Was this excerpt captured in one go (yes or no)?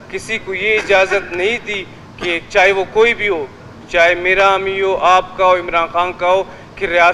yes